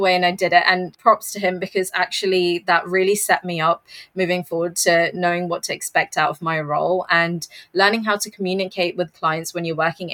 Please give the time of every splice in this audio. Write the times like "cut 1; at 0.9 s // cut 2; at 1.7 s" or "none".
cut 1; at 0.9 s